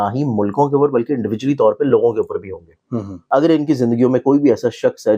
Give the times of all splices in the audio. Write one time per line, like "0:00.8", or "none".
0:03.2